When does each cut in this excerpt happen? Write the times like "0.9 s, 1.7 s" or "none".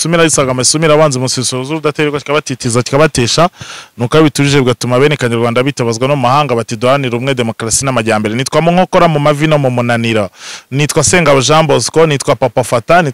none

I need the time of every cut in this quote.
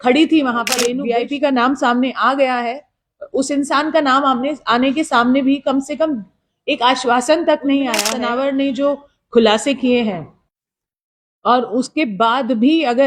1.0 s, 8.1 s

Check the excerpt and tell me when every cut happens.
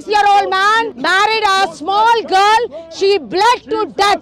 1.0 s

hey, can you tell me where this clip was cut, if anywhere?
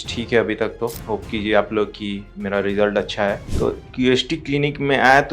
3.5 s

